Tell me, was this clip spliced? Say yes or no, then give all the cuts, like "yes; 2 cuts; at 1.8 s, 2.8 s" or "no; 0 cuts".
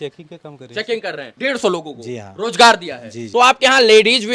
yes; 2 cuts; at 1.3 s, 3.2 s